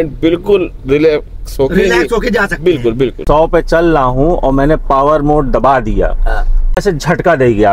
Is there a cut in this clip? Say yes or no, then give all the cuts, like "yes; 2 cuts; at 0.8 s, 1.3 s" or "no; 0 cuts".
yes; 2 cuts; at 3.2 s, 6.8 s